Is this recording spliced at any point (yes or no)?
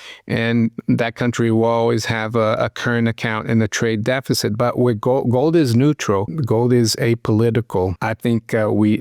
yes